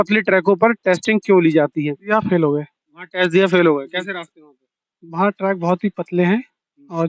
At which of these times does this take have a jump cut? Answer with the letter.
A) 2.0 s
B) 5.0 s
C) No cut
A